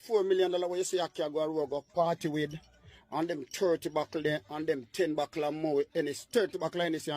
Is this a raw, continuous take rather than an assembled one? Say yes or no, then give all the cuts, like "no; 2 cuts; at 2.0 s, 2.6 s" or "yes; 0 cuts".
yes; 0 cuts